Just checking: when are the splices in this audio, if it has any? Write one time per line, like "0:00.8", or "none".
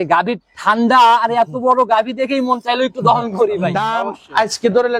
0:03.8